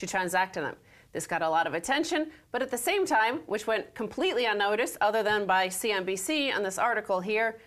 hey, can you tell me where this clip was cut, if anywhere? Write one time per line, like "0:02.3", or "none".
0:05.4